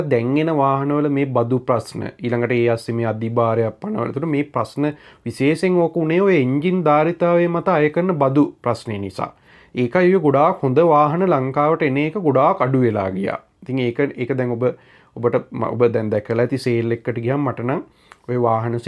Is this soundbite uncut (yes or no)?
yes